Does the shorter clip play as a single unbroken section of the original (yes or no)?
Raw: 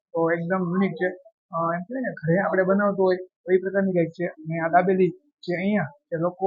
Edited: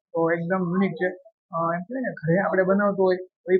yes